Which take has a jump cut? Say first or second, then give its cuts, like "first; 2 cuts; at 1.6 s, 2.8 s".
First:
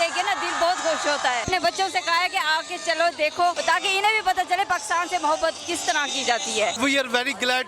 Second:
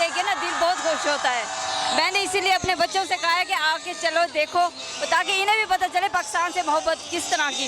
first; 3 cuts; at 1.5 s, 3.6 s, 6.7 s